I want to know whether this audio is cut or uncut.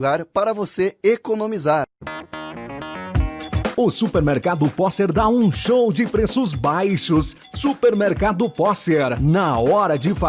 cut